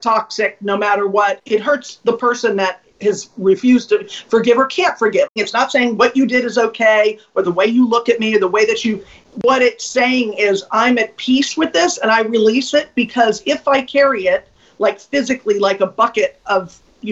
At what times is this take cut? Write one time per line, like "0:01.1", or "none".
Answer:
0:01.4
0:05.3